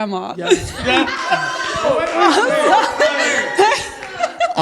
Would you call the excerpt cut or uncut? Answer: uncut